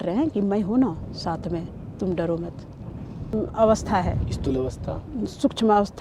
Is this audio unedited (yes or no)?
no